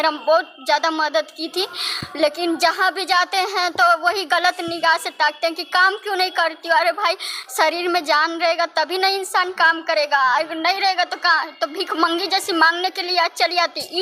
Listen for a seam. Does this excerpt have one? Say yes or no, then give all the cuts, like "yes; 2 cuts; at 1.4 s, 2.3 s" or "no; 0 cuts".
no; 0 cuts